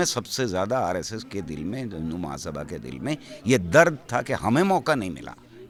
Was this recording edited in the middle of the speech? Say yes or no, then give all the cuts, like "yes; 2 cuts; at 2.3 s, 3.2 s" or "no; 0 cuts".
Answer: no; 0 cuts